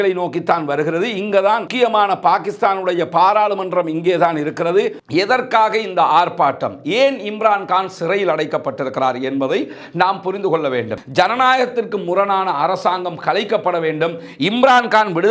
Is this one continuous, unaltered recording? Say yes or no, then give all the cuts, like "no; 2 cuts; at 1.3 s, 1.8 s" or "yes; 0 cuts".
no; 2 cuts; at 5.0 s, 11.0 s